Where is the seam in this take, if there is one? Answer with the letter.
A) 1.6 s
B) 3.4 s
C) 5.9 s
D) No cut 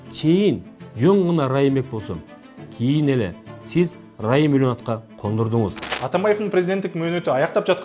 C